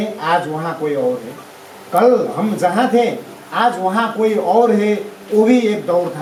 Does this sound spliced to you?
no; 0 cuts

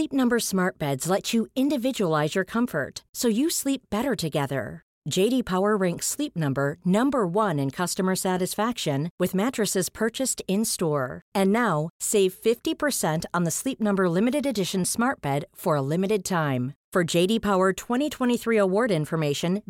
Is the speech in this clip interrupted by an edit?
no; 0 cuts

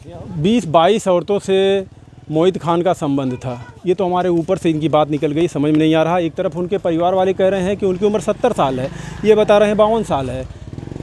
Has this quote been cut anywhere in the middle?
no; 0 cuts

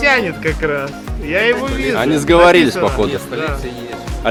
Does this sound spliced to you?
no; 0 cuts

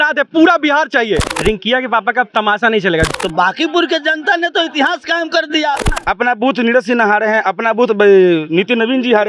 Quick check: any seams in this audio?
yes; 3 cuts; at 1.3 s, 3.1 s, 5.9 s

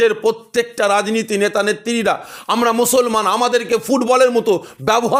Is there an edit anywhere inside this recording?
no; 0 cuts

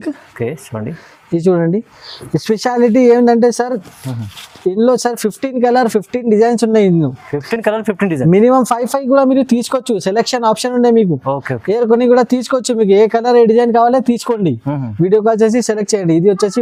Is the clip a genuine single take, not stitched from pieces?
yes; 0 cuts

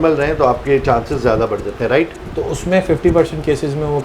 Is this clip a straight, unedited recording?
no; 1 cut; at 2.2 s

